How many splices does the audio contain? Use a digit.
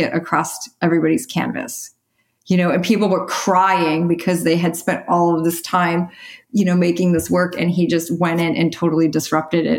0